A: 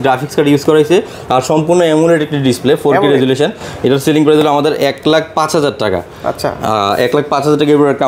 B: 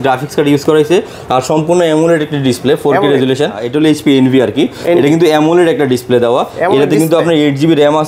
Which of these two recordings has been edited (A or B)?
B